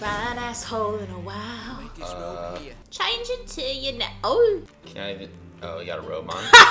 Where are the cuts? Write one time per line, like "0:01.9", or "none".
0:02.8
0:04.8